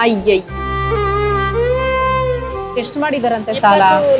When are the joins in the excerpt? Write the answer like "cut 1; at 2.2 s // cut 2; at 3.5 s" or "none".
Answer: cut 1; at 2.6 s